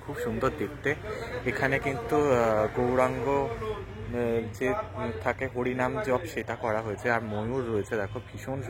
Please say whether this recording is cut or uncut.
uncut